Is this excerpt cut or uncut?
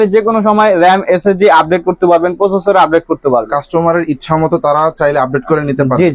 uncut